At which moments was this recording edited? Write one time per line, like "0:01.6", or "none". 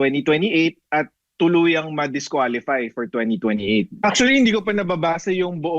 0:03.9